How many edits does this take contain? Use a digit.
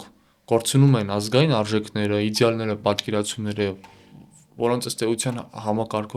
0